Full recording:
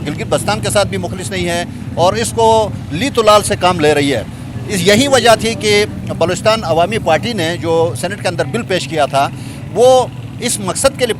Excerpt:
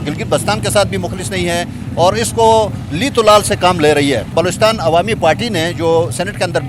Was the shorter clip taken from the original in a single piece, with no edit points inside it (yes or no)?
no